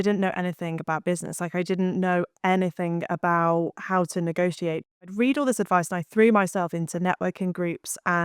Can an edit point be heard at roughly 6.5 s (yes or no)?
no